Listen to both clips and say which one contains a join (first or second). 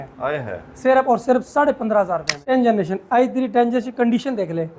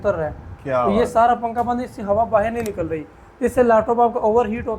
first